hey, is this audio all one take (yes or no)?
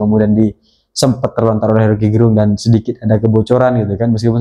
yes